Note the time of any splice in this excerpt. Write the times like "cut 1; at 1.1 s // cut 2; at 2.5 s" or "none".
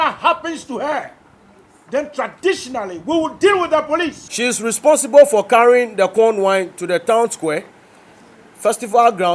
cut 1; at 4.2 s